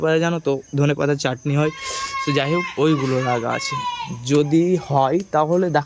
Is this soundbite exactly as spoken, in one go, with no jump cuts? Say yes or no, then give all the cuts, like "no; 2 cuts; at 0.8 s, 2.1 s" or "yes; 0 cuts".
yes; 0 cuts